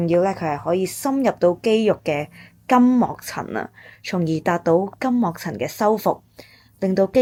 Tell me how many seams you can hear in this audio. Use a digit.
0